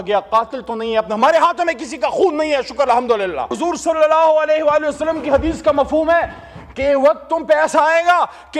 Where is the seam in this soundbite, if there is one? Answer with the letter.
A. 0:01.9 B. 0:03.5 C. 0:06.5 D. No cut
B